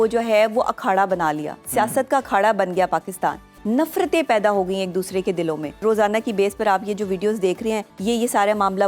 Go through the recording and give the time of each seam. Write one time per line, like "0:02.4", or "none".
0:03.5
0:05.8
0:07.9